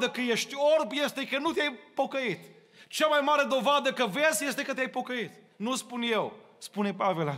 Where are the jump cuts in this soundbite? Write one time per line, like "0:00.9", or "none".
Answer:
none